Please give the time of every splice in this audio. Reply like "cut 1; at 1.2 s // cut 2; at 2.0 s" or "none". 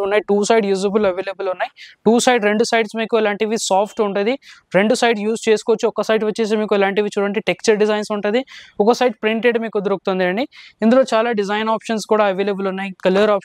none